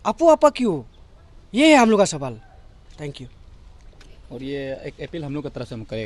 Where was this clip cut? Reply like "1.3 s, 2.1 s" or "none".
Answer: none